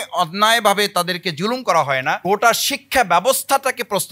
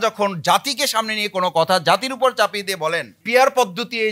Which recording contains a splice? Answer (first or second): first